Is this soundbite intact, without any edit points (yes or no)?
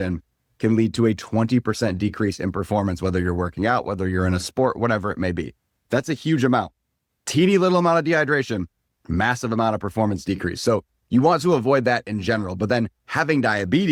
yes